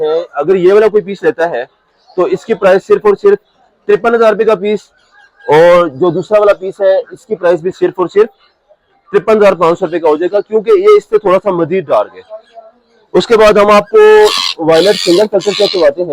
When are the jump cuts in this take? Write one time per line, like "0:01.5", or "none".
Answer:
none